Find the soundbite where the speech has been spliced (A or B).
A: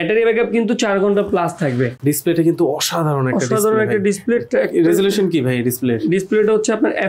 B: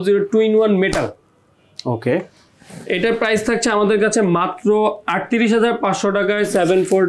A